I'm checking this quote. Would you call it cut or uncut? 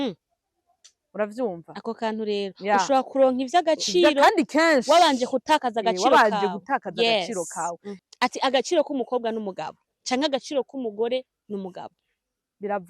cut